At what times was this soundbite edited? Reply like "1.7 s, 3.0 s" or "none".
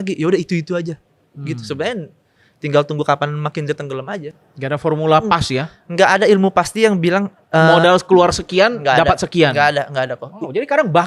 4.2 s